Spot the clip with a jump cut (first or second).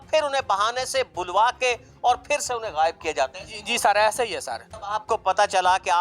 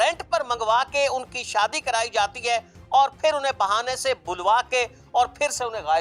first